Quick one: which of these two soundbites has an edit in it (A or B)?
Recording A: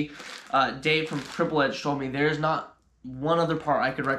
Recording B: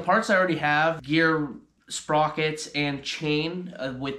B